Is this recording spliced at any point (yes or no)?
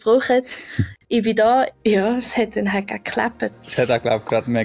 yes